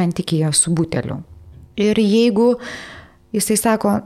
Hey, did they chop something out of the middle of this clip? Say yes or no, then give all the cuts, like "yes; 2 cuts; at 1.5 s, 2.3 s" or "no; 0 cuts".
yes; 1 cut; at 1.5 s